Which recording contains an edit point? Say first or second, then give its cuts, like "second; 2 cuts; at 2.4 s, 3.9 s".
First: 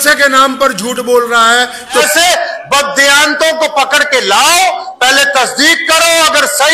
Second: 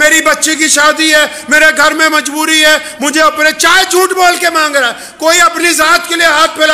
first; 1 cut; at 2.1 s